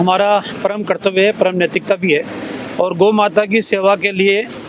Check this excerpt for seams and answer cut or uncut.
uncut